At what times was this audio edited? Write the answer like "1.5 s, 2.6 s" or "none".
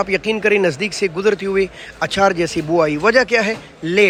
none

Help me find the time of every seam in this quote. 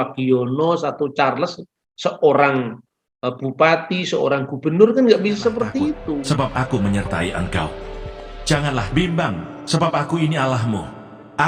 6.2 s

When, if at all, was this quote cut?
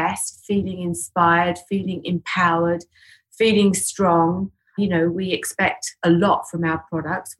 4.8 s

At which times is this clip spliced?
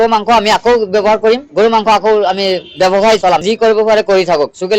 3.4 s

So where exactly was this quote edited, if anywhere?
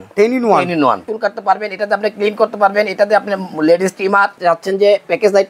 1.0 s, 4.3 s

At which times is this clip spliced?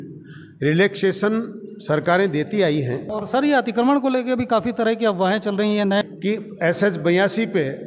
3.1 s, 6.0 s

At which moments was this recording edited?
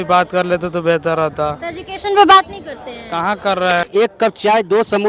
3.9 s

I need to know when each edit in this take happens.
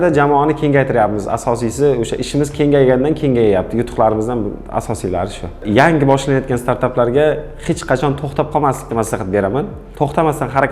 5.5 s, 9.8 s

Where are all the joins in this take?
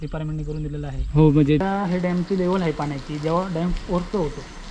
1.6 s

